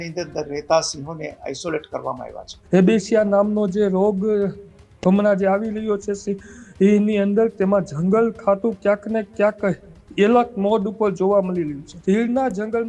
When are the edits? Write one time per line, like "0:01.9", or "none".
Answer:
0:02.5
0:11.9